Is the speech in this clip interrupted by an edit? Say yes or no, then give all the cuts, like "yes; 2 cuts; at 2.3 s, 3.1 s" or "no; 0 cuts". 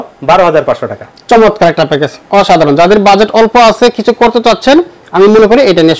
no; 0 cuts